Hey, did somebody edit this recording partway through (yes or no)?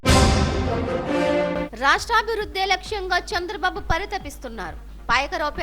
yes